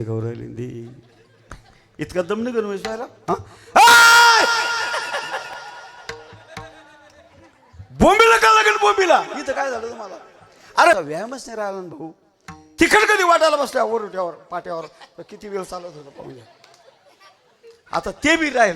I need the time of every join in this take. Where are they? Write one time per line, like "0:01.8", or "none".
0:11.0